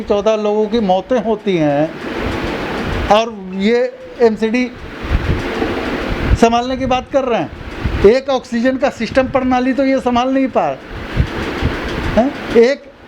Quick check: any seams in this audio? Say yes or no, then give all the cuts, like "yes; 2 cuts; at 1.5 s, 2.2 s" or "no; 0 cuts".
no; 0 cuts